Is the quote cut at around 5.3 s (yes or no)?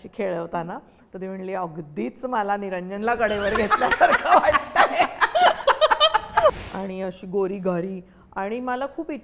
no